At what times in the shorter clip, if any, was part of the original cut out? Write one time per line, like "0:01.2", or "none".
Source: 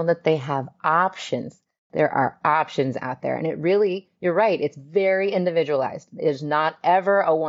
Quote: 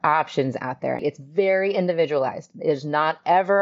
0:01.0